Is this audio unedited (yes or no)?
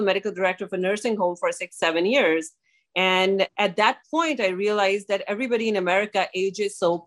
no